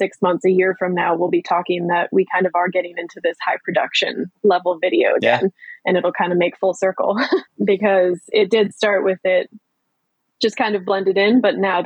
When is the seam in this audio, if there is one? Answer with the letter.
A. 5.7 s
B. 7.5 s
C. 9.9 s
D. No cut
B